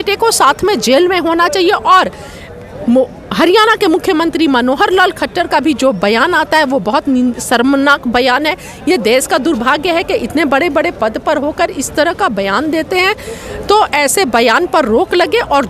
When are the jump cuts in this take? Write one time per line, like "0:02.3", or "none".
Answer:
none